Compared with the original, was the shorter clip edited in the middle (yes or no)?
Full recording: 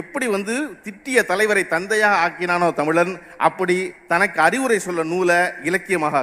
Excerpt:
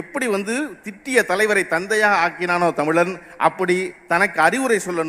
no